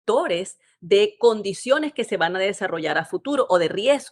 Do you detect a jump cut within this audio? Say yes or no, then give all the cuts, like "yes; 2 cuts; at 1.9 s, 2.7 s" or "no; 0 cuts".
no; 0 cuts